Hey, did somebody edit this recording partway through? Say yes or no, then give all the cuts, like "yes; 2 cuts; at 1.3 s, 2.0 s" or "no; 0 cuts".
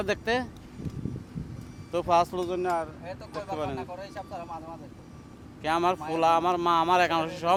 no; 0 cuts